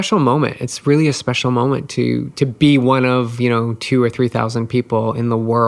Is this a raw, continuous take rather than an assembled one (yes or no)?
yes